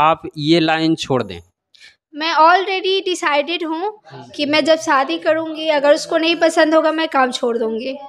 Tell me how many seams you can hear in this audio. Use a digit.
0